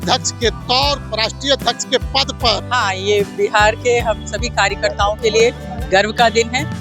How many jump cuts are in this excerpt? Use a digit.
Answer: 1